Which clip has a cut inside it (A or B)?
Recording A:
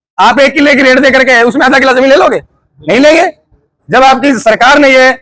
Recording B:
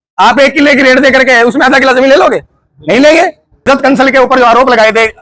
B